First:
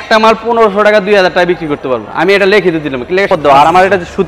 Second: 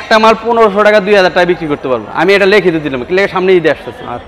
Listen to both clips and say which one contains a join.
first; 1 cut; at 3.3 s

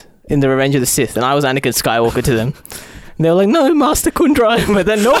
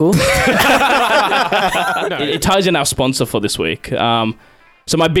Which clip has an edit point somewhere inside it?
second; 1 cut; at 2.2 s

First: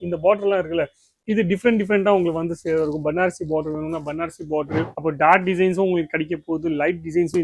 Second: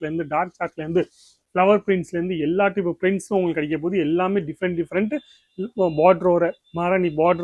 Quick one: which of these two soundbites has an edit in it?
first; 1 cut; at 4.9 s

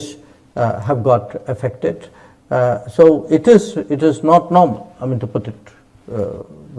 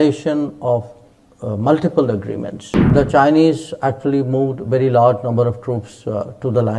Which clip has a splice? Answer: second; 1 cut; at 2.9 s

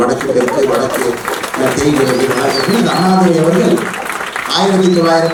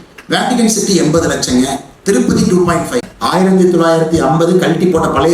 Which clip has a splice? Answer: second; 1 cut; at 3.1 s

